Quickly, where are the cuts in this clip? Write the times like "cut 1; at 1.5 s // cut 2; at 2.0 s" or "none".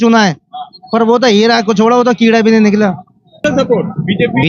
none